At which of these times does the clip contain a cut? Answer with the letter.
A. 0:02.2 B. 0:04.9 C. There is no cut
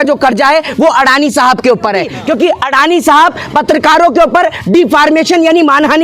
A